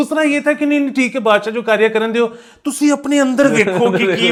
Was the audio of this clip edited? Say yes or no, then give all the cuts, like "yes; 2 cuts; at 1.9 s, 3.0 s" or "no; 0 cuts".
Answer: no; 0 cuts